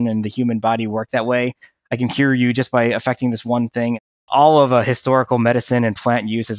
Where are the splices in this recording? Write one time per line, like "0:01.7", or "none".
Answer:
0:04.3